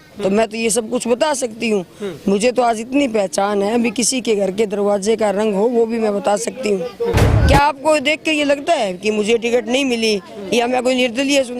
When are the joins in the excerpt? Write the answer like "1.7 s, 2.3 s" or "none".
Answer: 7.2 s

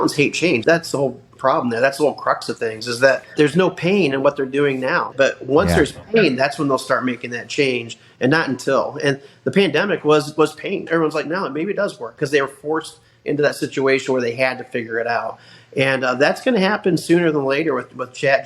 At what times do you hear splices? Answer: 3.3 s, 5.1 s, 10.8 s

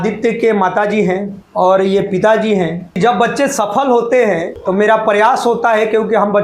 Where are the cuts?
1.4 s, 3.0 s, 4.5 s

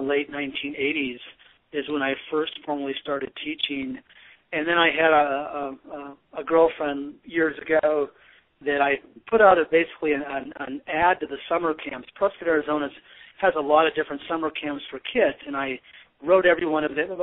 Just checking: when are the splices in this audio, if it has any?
1.1 s

